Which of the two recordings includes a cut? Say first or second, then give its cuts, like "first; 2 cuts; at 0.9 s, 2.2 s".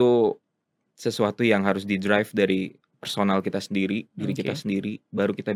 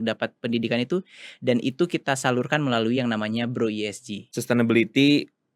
second; 1 cut; at 4.3 s